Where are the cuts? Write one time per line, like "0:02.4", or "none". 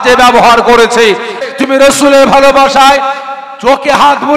0:01.4